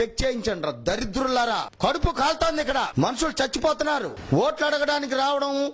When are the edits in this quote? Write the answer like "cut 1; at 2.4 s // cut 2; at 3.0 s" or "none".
cut 1; at 1.7 s // cut 2; at 2.9 s // cut 3; at 4.2 s

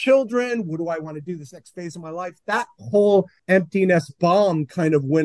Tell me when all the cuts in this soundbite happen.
cut 1; at 3.4 s

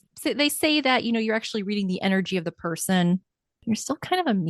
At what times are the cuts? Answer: none

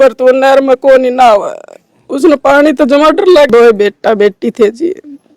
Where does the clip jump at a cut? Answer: cut 1; at 3.5 s

